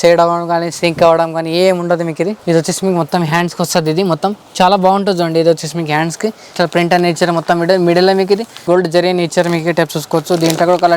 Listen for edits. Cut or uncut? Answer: cut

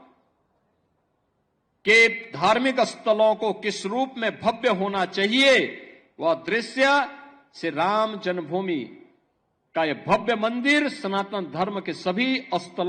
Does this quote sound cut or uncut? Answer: uncut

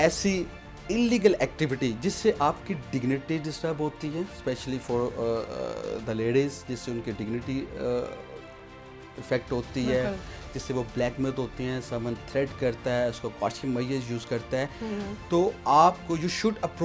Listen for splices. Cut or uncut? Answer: uncut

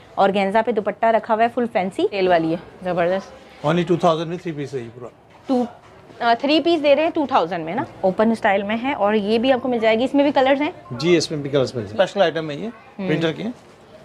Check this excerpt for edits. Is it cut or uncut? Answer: cut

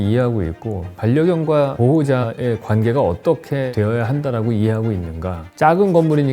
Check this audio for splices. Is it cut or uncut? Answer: cut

